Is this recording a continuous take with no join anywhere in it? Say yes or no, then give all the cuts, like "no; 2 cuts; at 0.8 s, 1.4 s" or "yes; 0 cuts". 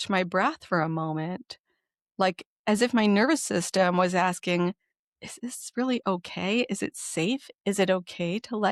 yes; 0 cuts